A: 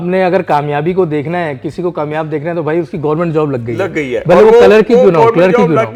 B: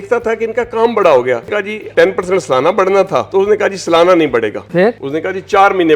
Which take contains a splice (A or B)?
B